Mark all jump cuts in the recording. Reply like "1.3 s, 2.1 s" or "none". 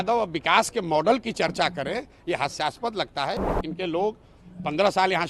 3.5 s